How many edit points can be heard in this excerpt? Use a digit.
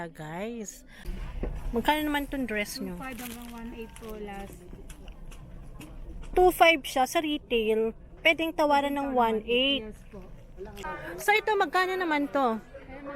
2